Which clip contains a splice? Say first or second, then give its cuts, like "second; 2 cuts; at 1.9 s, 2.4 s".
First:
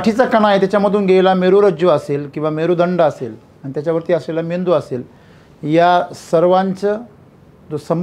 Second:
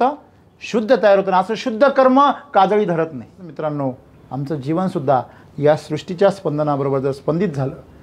second; 1 cut; at 3.4 s